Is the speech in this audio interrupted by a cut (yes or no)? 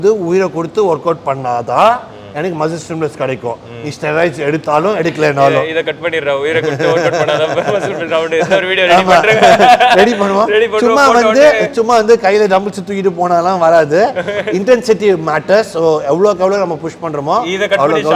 no